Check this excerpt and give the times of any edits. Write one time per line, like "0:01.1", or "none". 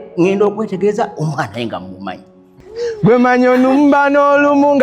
0:02.5